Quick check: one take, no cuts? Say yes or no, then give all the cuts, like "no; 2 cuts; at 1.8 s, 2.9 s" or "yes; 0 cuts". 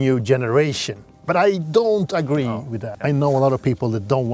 no; 1 cut; at 2.9 s